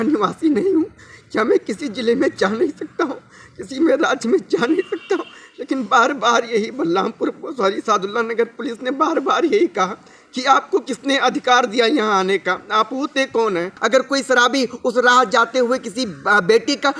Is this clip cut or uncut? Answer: cut